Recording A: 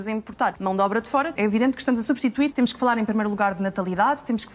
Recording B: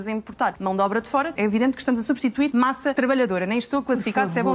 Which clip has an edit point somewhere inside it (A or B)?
A